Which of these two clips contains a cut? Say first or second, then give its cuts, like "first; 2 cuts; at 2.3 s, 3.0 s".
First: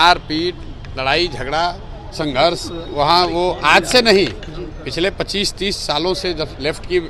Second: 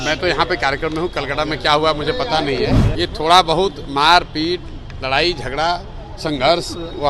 second; 1 cut; at 2.8 s